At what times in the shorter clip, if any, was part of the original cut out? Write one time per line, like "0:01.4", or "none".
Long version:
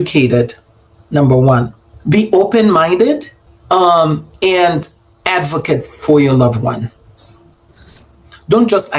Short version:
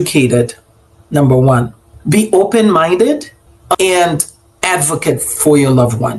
0:03.7